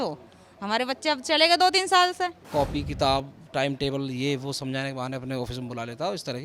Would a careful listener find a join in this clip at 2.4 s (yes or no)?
yes